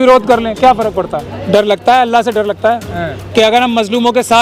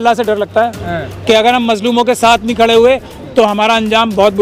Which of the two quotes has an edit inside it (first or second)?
first